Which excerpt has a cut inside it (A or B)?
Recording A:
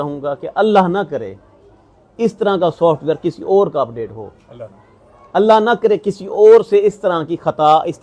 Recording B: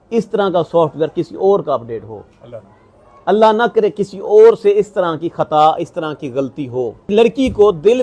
B